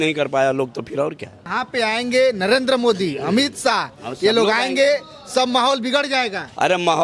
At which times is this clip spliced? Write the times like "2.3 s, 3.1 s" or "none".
1.6 s